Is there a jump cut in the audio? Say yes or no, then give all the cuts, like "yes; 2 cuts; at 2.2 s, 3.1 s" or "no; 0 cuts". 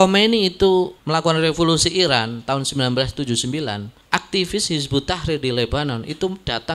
yes; 2 cuts; at 1.0 s, 3.9 s